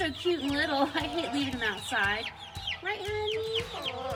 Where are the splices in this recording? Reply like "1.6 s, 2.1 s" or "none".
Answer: none